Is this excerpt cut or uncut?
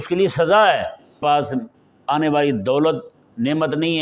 cut